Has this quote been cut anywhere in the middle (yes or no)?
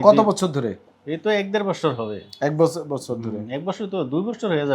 no